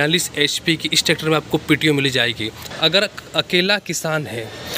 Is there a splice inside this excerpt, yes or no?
yes